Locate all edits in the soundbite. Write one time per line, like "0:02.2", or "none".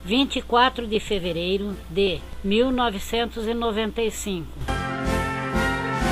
0:04.7